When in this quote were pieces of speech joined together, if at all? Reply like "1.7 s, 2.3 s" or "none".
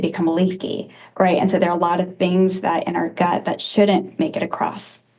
none